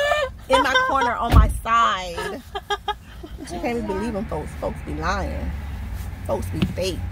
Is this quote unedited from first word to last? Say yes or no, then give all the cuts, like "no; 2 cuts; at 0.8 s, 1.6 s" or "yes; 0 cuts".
no; 1 cut; at 3.4 s